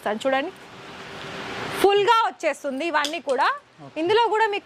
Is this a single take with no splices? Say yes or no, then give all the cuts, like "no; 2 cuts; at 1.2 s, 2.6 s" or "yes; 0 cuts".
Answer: yes; 0 cuts